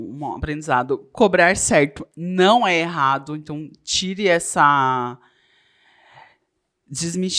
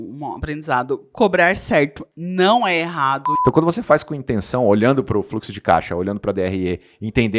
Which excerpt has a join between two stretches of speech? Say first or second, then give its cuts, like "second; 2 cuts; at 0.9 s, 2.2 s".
second; 1 cut; at 3.3 s